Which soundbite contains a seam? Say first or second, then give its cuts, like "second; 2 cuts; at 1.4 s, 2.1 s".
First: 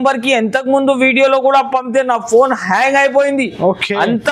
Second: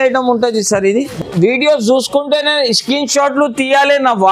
second; 1 cut; at 1.2 s